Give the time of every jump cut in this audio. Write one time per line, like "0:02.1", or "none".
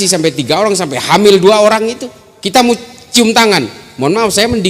none